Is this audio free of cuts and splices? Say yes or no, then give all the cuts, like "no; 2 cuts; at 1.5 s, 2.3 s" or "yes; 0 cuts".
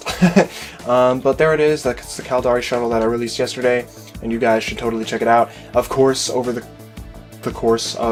yes; 0 cuts